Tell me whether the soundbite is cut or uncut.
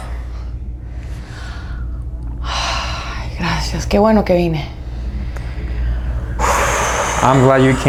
uncut